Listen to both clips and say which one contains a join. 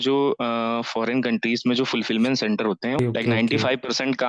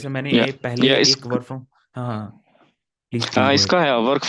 first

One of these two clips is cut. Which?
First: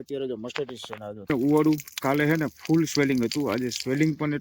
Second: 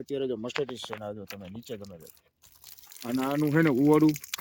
first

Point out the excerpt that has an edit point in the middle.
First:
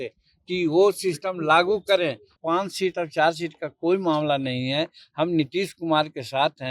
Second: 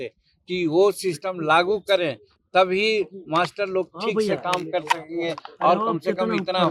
first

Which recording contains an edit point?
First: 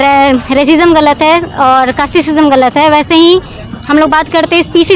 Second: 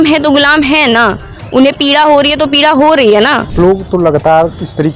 second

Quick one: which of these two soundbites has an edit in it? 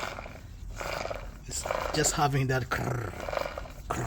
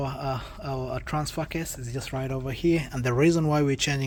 first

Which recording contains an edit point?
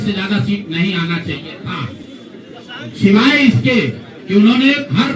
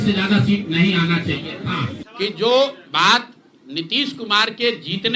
second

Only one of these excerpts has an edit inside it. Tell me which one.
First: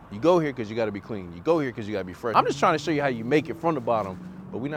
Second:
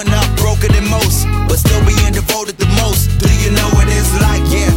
first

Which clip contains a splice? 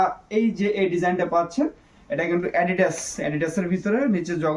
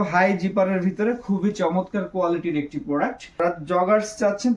second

